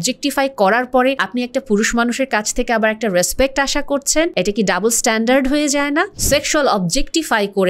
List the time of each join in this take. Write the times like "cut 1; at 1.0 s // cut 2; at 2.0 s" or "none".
cut 1; at 1.2 s // cut 2; at 4.3 s // cut 3; at 6.2 s